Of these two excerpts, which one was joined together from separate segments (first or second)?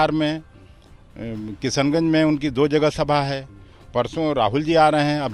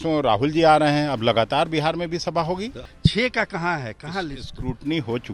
second